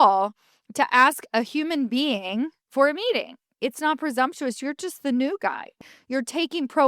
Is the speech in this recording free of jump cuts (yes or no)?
no